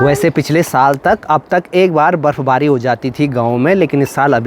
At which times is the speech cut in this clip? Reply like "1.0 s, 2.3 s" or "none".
none